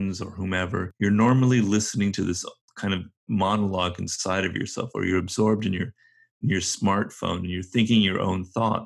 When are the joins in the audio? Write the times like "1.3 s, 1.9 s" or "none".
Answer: 0.9 s